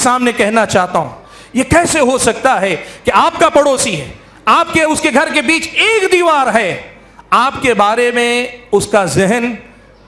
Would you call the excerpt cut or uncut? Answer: uncut